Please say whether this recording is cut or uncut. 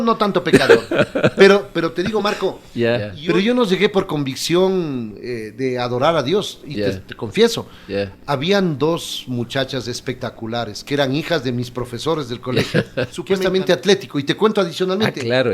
cut